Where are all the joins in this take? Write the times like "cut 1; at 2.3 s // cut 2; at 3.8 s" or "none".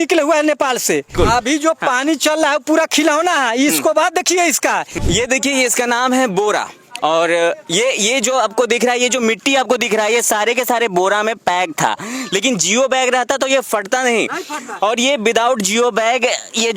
cut 1; at 1.1 s // cut 2; at 4.9 s